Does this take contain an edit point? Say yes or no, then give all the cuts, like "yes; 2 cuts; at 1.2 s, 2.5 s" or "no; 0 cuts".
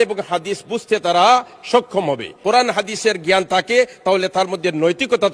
yes; 1 cut; at 2.3 s